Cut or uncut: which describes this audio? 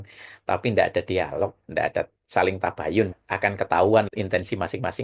cut